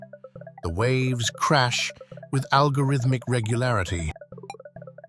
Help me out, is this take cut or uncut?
cut